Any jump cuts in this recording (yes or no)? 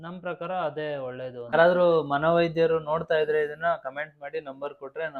yes